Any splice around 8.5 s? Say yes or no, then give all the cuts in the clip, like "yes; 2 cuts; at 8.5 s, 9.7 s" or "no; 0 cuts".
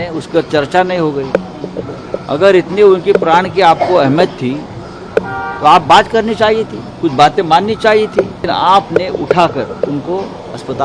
yes; 1 cut; at 8.5 s